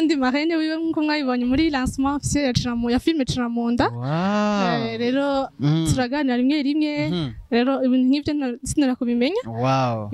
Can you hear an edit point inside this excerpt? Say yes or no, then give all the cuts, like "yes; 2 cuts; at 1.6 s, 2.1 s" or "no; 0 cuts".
no; 0 cuts